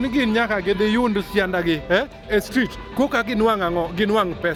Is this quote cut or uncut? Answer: uncut